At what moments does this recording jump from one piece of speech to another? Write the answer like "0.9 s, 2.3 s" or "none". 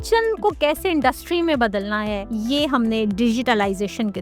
2.3 s